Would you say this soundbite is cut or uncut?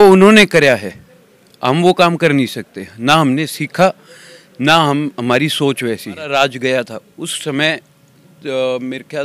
cut